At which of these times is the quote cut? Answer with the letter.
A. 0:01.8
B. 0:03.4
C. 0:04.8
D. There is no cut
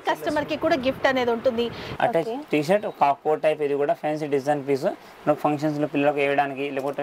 A